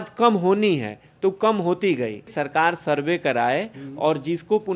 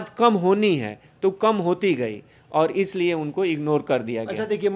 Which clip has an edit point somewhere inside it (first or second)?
first